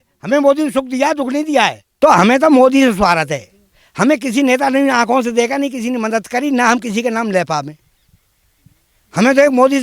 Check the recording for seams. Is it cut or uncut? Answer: cut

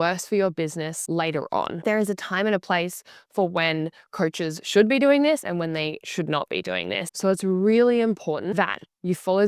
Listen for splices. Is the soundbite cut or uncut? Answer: cut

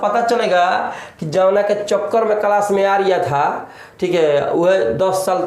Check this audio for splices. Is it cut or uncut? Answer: uncut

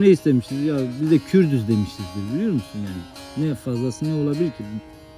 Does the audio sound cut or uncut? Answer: uncut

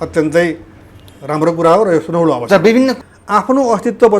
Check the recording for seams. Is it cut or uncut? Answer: cut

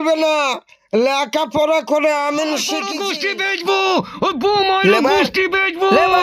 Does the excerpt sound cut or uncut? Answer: cut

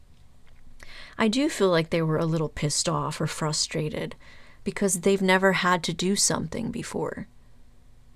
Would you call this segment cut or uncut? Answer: uncut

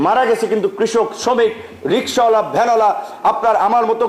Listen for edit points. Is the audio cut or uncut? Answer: uncut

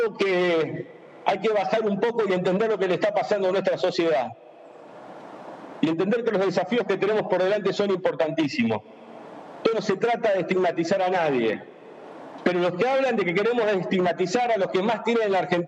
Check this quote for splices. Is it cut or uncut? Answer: uncut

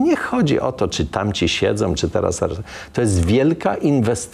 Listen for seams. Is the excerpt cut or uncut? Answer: uncut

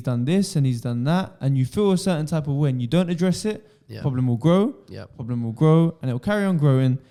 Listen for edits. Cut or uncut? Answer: uncut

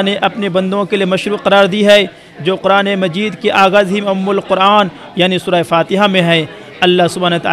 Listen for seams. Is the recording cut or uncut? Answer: uncut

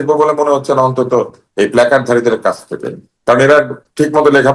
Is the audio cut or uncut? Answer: uncut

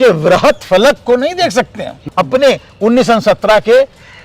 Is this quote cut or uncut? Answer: cut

